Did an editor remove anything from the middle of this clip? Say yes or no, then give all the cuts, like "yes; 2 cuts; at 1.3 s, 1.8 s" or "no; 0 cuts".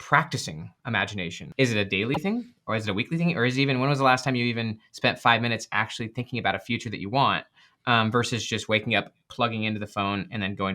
yes; 1 cut; at 1.4 s